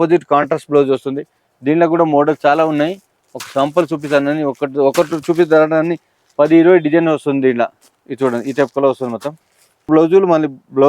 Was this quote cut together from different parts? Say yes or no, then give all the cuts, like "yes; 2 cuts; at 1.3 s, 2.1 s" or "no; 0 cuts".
yes; 1 cut; at 9.9 s